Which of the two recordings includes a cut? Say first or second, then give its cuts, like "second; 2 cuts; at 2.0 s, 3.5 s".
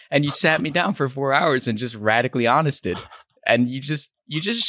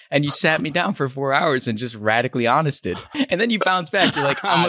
second; 1 cut; at 3.1 s